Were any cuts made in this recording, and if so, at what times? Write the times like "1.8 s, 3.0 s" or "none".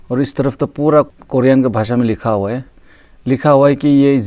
1.1 s